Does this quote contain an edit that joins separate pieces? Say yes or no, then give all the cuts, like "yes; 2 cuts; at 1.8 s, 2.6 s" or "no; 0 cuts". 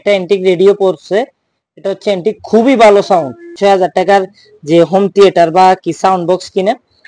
yes; 1 cut; at 3.5 s